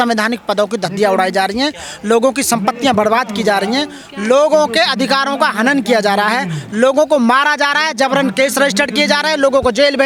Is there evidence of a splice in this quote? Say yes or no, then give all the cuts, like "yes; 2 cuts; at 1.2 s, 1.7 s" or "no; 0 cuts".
no; 0 cuts